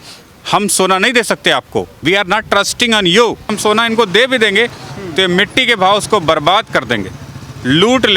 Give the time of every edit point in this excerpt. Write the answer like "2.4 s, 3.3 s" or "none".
3.5 s